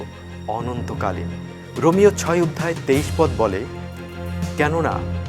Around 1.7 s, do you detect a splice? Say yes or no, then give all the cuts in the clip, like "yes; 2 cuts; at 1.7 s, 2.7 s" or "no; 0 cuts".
yes; 1 cut; at 1.7 s